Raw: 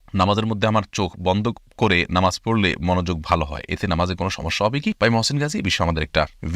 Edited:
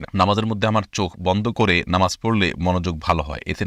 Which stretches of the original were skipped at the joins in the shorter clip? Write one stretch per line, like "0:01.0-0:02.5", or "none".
0:01.5-0:01.8